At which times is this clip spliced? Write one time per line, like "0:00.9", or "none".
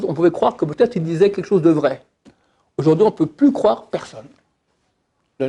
none